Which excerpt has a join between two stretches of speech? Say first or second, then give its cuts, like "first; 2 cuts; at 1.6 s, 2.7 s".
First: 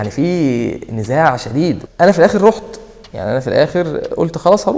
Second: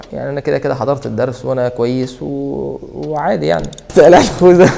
second; 1 cut; at 3.8 s